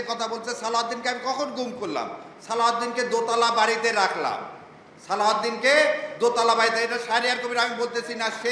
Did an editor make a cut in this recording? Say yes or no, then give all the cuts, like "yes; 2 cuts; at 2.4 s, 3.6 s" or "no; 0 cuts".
no; 0 cuts